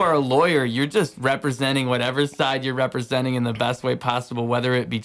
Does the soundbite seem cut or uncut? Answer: uncut